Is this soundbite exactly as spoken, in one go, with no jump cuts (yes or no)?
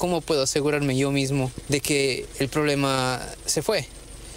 no